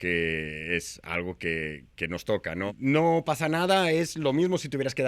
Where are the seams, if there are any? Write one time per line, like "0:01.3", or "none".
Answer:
0:02.7